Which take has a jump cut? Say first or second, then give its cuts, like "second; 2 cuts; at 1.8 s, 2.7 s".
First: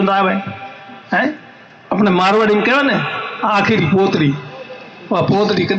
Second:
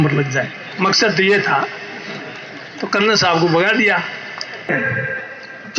second; 1 cut; at 4.7 s